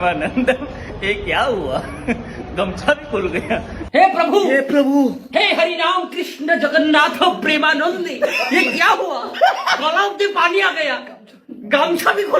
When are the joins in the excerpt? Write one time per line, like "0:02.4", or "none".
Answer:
0:03.8